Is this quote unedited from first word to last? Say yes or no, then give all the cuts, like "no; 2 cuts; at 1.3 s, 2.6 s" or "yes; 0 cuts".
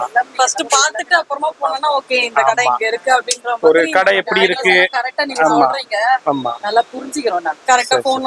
yes; 0 cuts